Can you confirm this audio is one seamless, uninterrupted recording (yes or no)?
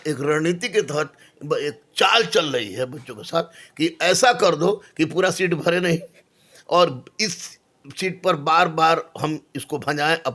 yes